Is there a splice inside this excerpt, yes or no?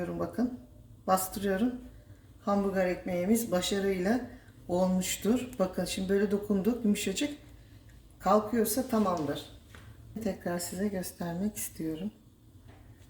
yes